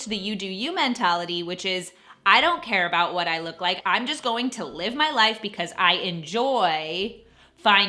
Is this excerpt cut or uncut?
uncut